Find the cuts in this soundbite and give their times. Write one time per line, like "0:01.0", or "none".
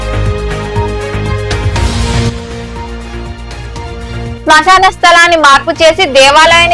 0:01.6